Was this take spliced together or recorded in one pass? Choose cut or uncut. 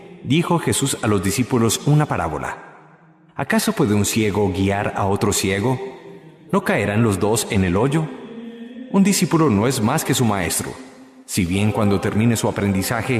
uncut